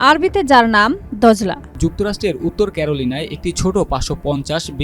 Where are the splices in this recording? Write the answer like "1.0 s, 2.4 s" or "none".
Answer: 1.6 s